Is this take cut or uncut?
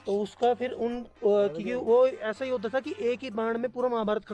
uncut